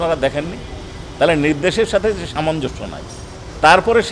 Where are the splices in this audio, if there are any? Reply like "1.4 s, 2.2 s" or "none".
none